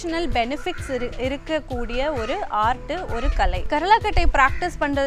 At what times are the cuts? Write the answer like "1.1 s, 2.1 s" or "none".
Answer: 3.7 s